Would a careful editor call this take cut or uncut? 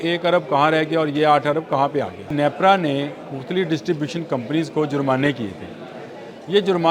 cut